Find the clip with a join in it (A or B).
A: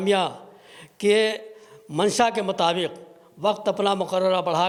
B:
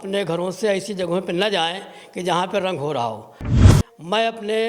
B